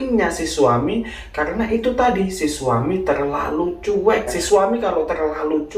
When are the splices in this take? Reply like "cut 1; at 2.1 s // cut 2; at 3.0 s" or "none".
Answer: cut 1; at 4.4 s